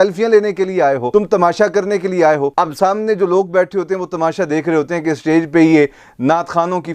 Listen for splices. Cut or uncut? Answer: uncut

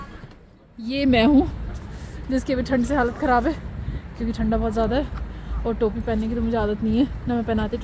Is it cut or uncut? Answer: cut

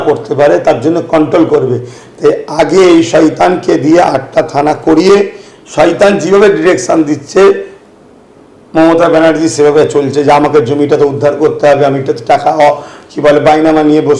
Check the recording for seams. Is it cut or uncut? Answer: uncut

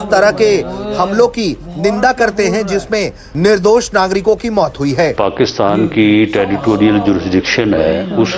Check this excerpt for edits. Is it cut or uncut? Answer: cut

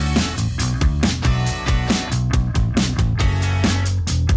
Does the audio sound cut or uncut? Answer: cut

